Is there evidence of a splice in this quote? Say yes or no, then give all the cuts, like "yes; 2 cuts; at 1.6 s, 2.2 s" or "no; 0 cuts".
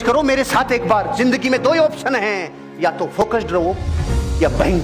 no; 0 cuts